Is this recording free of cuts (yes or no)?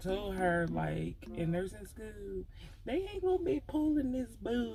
yes